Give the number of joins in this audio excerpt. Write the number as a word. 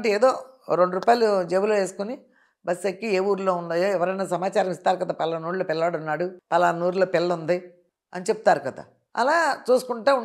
zero